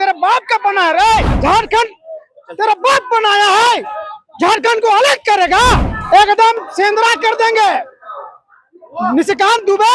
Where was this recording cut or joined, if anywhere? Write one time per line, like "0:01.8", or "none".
0:01.3
0:05.9